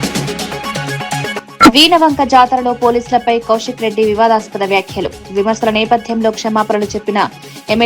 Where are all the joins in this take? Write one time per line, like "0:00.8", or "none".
0:01.4